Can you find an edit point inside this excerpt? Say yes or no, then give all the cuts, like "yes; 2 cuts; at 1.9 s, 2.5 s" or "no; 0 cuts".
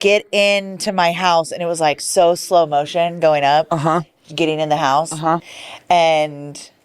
yes; 1 cut; at 5.5 s